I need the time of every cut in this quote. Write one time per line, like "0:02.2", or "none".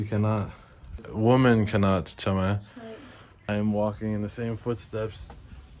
0:01.0
0:03.5